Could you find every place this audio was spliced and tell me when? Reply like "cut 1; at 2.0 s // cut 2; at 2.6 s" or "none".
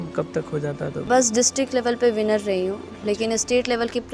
cut 1; at 1.0 s